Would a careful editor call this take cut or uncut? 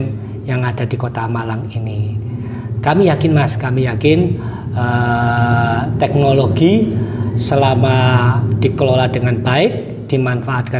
uncut